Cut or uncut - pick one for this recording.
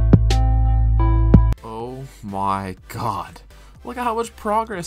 cut